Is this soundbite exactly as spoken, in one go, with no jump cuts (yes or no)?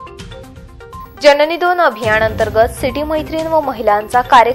no